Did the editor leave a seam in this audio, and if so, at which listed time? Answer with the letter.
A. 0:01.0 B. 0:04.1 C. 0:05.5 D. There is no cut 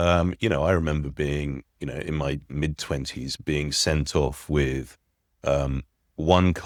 D